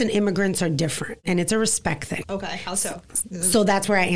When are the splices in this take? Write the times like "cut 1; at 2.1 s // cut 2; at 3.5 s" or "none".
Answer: cut 1; at 1.2 s // cut 2; at 2.2 s